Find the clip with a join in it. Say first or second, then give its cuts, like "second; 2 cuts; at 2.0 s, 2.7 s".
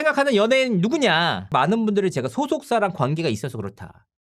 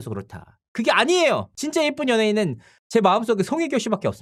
first; 1 cut; at 1.5 s